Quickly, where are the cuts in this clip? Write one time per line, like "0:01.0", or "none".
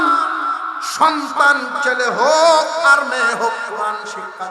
none